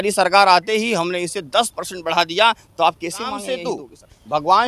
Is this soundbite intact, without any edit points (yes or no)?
no